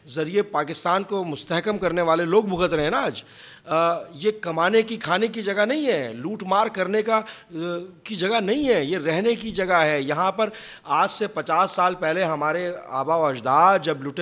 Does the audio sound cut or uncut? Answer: uncut